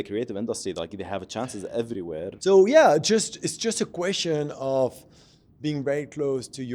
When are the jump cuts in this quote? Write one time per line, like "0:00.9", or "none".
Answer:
0:02.4